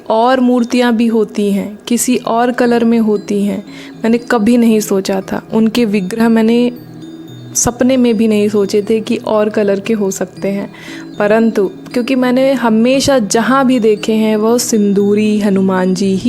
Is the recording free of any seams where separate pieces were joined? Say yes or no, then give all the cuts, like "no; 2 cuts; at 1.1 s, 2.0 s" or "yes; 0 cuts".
yes; 0 cuts